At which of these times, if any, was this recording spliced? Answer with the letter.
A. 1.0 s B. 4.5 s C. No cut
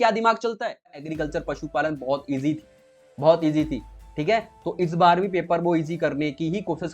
A